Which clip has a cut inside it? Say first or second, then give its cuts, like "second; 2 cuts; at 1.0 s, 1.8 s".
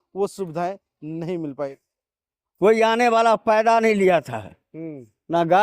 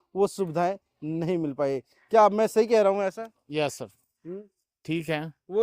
first; 1 cut; at 1.7 s